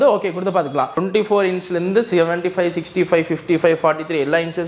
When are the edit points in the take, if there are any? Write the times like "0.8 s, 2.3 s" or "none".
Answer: 1.0 s